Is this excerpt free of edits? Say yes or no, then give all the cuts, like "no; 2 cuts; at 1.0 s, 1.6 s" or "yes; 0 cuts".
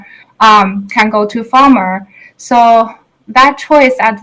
yes; 0 cuts